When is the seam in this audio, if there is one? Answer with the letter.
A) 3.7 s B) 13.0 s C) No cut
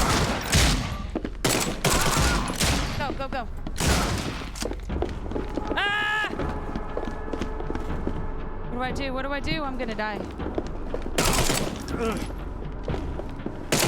A